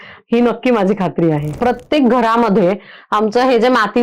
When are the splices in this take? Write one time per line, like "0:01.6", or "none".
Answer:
0:01.5